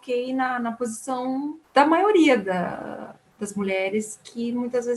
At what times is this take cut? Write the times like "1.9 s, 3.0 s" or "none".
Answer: 1.6 s